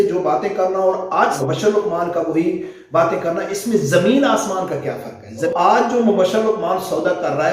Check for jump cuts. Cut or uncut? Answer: cut